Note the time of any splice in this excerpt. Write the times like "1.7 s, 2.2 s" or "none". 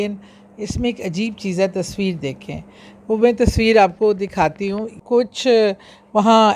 4.9 s